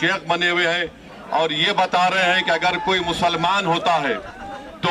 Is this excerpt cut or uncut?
uncut